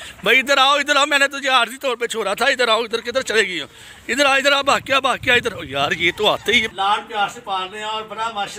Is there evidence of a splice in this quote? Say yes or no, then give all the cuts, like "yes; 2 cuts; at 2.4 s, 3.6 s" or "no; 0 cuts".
yes; 1 cut; at 6.7 s